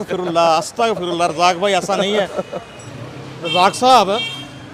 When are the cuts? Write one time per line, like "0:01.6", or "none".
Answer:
none